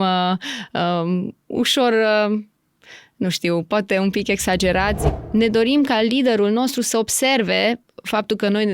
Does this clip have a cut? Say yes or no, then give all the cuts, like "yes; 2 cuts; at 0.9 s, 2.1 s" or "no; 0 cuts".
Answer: yes; 1 cut; at 5.0 s